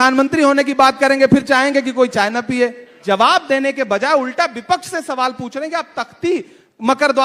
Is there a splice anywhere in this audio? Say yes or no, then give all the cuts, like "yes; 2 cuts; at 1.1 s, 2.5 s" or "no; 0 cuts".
yes; 1 cut; at 2.9 s